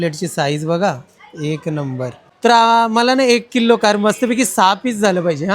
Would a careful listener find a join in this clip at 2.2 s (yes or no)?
yes